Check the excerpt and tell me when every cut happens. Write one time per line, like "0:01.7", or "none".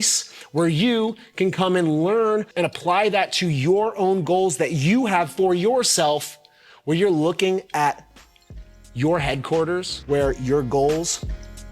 0:02.5